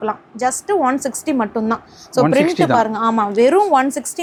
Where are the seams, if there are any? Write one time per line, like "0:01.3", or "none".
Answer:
none